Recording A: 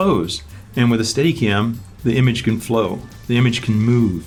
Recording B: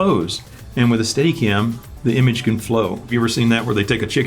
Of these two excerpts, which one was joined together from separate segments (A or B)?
B